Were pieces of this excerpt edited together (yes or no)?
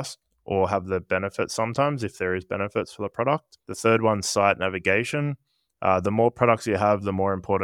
yes